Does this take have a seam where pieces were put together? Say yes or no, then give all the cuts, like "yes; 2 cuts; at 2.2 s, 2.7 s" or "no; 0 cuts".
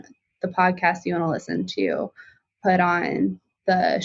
no; 0 cuts